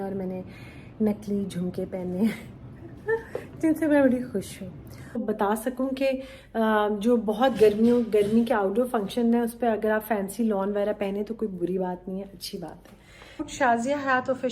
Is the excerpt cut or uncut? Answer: cut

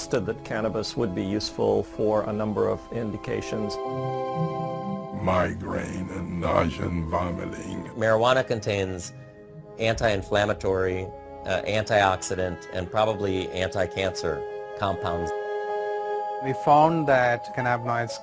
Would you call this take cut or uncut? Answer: uncut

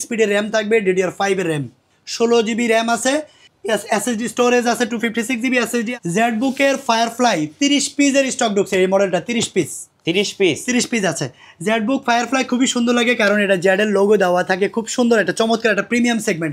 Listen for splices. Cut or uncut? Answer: cut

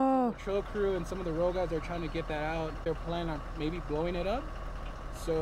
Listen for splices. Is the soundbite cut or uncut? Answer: cut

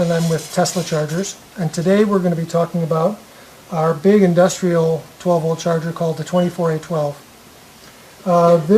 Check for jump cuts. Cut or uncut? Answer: cut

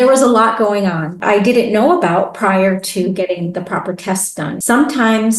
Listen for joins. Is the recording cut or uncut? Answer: cut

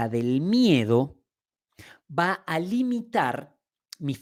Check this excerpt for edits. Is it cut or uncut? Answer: uncut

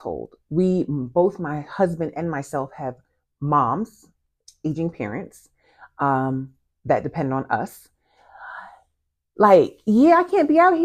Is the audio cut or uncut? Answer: uncut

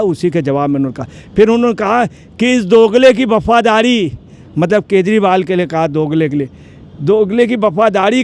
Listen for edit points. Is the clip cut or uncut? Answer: uncut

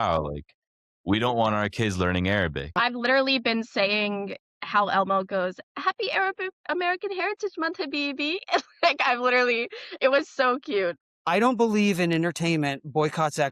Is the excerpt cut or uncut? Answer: cut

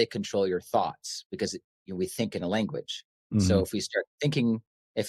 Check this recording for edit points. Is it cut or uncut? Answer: uncut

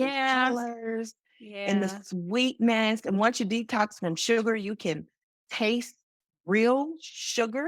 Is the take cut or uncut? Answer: uncut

